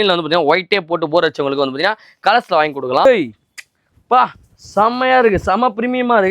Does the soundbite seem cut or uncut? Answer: cut